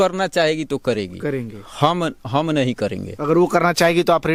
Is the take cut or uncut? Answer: uncut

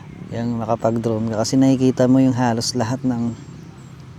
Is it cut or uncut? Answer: uncut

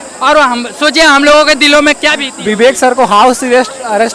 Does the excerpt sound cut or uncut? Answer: uncut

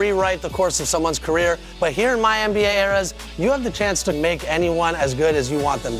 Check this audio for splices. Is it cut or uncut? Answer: cut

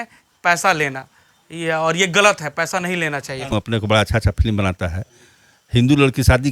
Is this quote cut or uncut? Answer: cut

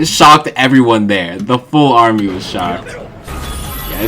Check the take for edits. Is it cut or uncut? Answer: cut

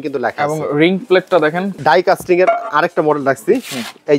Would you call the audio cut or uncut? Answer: cut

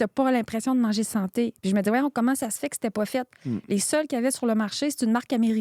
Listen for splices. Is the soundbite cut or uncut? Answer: uncut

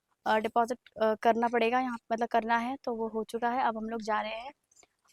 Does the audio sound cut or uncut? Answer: uncut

